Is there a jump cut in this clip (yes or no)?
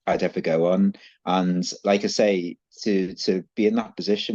no